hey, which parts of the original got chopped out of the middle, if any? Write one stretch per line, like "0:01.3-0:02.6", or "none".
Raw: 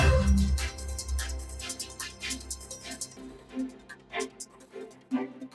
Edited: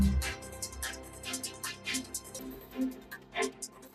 0:02.7-0:03.1